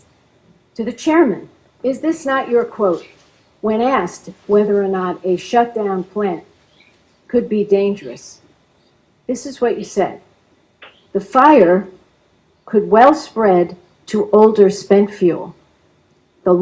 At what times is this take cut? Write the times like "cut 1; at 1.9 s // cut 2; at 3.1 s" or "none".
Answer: cut 1; at 9.5 s